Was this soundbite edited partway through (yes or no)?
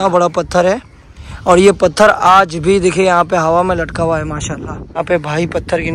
yes